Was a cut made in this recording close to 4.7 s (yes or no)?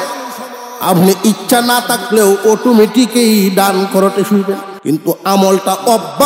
yes